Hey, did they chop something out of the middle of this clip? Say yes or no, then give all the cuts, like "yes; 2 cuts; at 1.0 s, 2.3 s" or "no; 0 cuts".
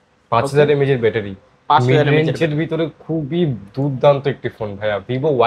no; 0 cuts